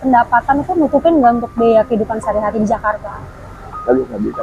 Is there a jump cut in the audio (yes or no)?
no